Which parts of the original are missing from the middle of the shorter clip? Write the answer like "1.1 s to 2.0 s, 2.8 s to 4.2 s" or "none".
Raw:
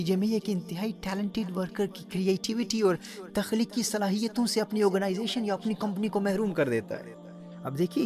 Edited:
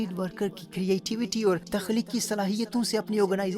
3.0 s to 3.3 s